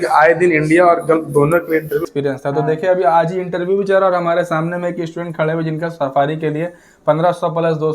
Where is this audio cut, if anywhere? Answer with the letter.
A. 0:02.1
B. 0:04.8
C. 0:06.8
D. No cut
A